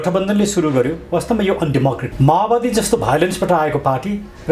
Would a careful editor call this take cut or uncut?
cut